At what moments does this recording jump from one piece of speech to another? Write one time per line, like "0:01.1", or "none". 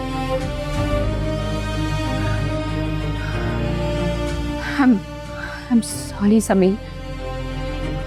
none